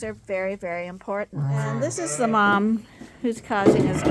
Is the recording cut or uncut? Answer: cut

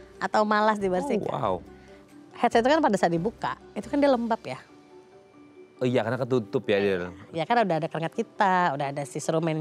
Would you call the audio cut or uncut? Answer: uncut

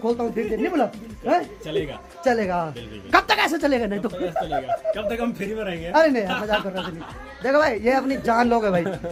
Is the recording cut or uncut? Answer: uncut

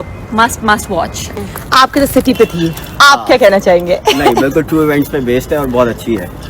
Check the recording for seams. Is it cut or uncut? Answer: cut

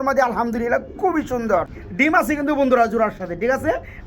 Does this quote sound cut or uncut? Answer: cut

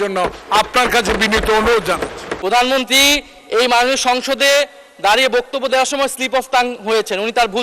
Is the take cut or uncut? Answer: cut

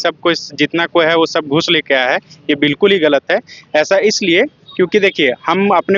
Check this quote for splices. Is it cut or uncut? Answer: uncut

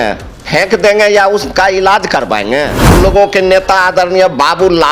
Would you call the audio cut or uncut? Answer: cut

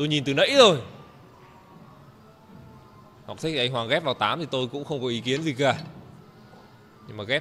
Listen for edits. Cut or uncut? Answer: uncut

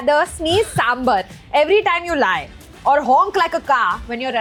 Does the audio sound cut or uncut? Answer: uncut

